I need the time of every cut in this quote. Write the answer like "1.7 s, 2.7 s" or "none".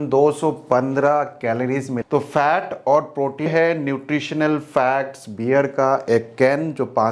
1.9 s, 3.5 s